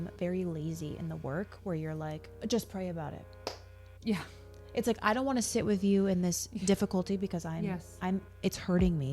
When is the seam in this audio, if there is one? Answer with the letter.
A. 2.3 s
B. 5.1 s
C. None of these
A